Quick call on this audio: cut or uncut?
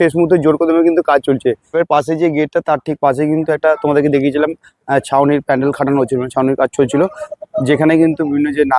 uncut